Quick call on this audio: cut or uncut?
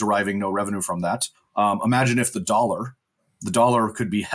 cut